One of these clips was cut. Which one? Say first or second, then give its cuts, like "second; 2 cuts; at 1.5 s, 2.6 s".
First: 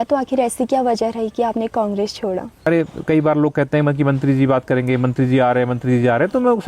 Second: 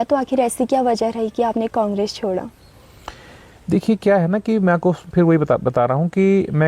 first; 1 cut; at 2.7 s